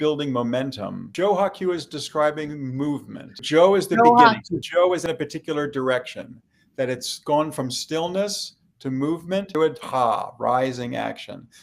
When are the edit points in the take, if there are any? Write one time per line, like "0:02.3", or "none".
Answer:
0:01.1
0:09.5